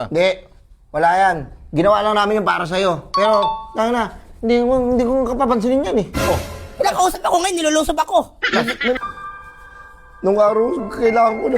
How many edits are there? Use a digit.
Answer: 1